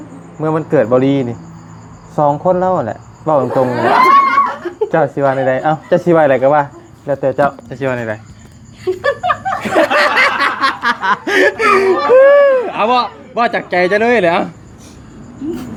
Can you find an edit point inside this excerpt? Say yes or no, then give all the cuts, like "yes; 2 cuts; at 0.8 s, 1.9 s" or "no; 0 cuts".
no; 0 cuts